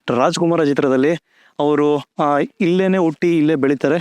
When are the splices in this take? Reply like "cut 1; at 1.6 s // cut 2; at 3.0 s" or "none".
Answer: cut 1; at 2.1 s